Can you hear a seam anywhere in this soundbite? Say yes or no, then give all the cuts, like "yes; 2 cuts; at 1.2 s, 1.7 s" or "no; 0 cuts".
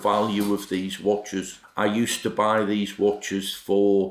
no; 0 cuts